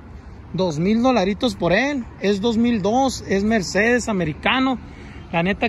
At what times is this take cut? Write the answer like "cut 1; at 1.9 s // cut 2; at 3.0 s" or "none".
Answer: none